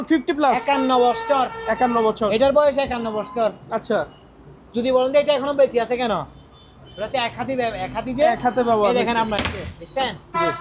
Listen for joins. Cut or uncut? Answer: uncut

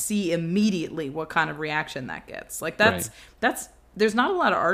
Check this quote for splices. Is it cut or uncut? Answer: uncut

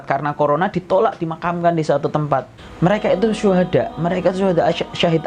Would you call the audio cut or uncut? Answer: cut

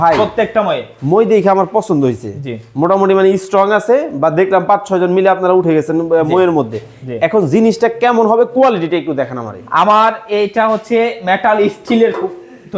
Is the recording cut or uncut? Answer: uncut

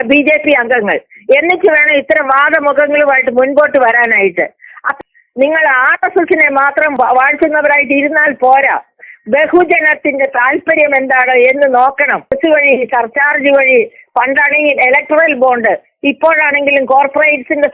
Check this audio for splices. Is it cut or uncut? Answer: cut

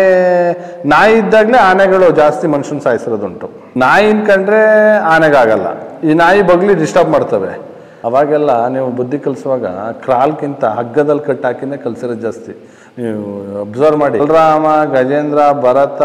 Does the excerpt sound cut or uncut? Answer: cut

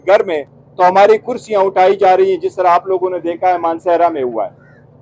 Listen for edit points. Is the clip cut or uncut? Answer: uncut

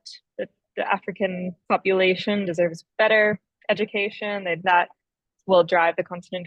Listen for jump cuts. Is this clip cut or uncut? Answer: cut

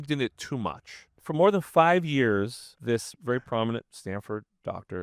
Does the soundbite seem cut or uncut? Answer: cut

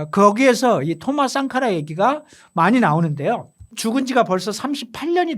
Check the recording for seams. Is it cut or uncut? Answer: cut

